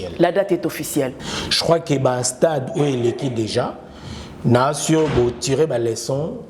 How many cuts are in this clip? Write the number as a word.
one